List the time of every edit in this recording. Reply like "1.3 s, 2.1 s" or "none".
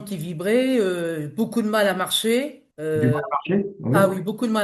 none